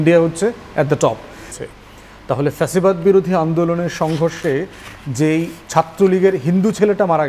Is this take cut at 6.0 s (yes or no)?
no